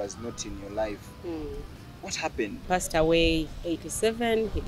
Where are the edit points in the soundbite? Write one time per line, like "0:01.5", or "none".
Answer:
0:02.6